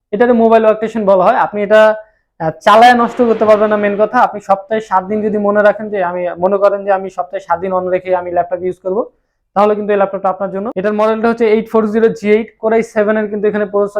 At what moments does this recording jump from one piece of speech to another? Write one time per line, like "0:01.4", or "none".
0:10.7